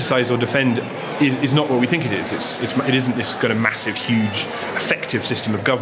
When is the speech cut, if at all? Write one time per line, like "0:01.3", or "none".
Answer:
0:01.0
0:04.6